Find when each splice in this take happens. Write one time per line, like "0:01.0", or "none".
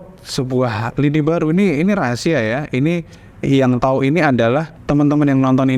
0:04.7